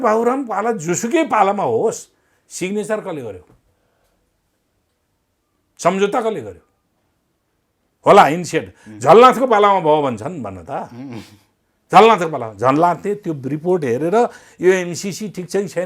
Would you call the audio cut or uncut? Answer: uncut